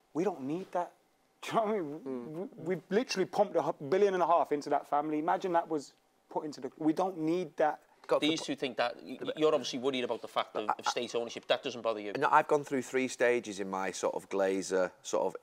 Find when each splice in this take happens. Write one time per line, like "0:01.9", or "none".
0:08.0